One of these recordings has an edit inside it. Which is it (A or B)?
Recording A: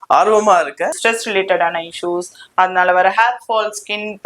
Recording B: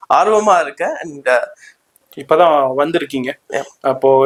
A